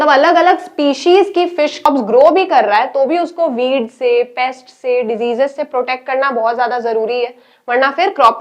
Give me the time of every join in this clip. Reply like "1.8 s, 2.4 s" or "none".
1.9 s